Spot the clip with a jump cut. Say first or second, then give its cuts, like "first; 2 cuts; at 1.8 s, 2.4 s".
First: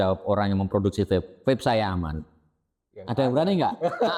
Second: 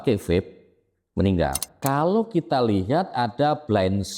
second; 1 cut; at 1.7 s